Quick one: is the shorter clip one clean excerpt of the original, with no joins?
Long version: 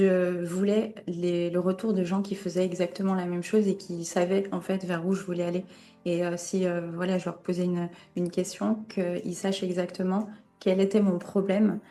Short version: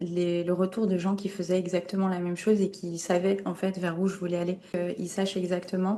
no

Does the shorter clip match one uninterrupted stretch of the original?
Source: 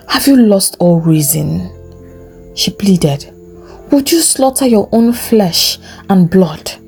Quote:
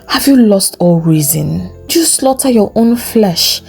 no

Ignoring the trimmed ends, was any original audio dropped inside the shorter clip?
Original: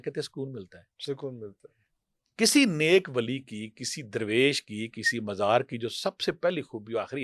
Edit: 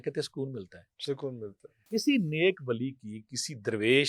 yes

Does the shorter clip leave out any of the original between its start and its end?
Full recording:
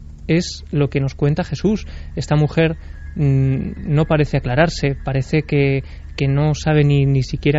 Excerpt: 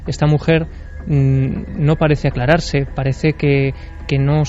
no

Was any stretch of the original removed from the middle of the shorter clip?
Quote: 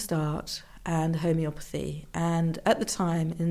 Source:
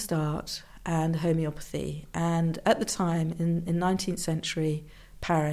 no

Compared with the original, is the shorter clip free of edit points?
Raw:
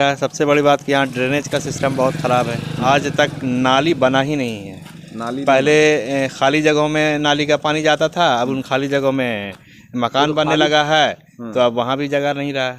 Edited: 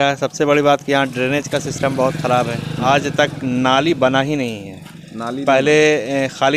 yes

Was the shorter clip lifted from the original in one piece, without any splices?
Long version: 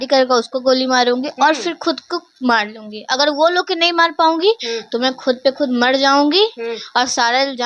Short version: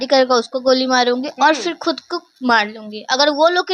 yes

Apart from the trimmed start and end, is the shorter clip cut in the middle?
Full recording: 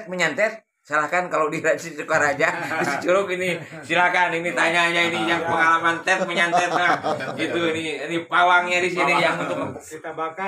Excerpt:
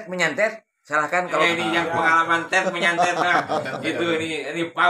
yes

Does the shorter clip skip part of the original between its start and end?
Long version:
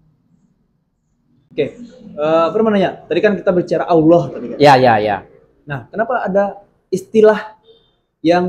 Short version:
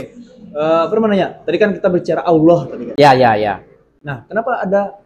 no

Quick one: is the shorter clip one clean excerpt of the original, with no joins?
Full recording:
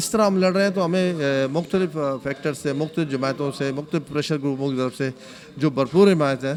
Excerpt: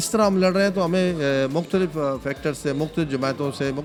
yes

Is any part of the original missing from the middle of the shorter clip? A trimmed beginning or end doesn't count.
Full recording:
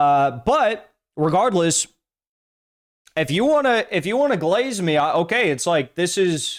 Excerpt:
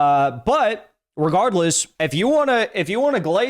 yes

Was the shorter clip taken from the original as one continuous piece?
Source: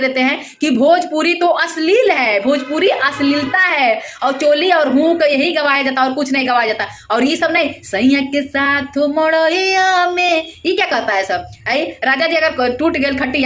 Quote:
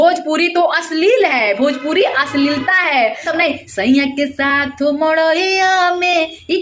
no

